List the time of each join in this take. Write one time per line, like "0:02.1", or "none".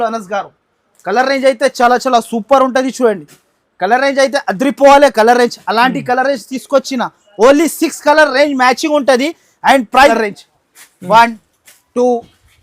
0:10.1